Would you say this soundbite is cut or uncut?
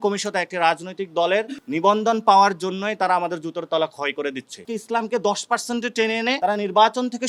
cut